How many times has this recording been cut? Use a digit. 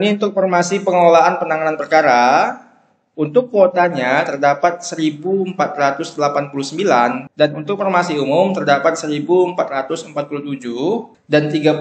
0